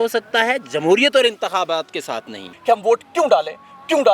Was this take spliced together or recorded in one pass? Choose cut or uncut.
cut